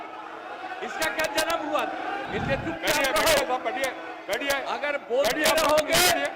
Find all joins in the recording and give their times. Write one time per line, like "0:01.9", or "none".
0:02.2